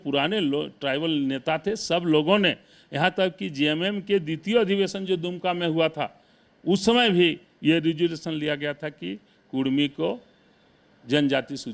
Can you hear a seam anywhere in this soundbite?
no; 0 cuts

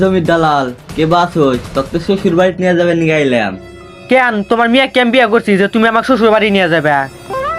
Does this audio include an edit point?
no; 0 cuts

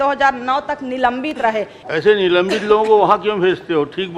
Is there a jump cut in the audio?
yes; 1 cut; at 1.8 s

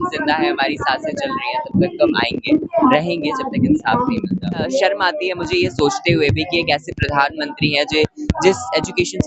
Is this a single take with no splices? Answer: no; 1 cut; at 4.7 s

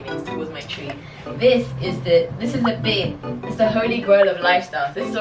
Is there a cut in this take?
no; 0 cuts

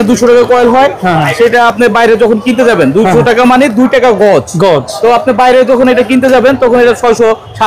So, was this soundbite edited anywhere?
no; 0 cuts

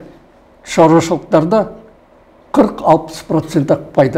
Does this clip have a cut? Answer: no; 0 cuts

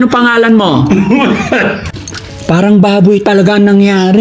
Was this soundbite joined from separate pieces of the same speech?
yes; 1 cut; at 1.9 s

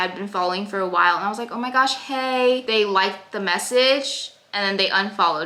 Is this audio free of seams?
yes; 0 cuts

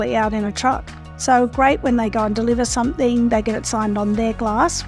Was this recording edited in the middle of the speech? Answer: no; 0 cuts

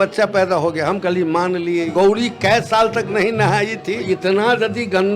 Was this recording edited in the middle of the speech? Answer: yes; 2 cuts; at 1.9 s, 4.0 s

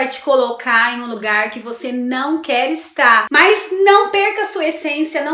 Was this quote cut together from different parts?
yes; 1 cut; at 3.3 s

